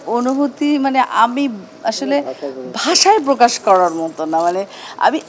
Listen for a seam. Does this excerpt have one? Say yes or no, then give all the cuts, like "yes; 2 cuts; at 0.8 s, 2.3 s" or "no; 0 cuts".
no; 0 cuts